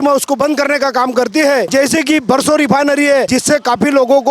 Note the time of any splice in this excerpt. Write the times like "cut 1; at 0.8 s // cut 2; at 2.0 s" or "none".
cut 1; at 1.7 s // cut 2; at 3.3 s